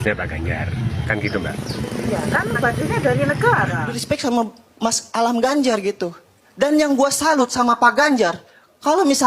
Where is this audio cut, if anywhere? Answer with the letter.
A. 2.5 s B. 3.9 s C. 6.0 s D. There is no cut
B